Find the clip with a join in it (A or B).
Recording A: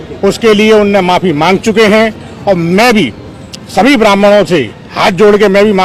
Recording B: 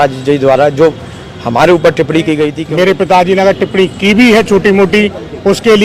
B